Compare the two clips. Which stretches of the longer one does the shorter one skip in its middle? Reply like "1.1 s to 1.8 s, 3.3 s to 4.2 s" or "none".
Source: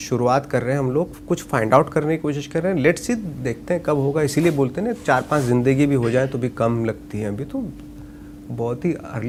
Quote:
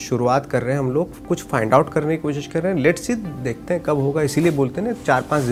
none